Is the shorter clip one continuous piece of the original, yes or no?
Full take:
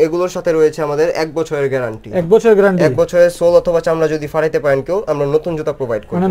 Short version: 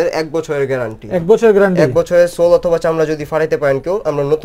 yes